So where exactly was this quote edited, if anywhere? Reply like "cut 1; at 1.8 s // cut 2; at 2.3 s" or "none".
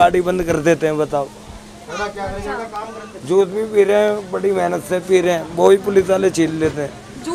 none